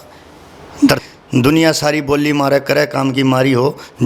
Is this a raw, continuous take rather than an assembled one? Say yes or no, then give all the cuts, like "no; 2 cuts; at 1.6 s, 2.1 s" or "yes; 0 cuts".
no; 1 cut; at 1.0 s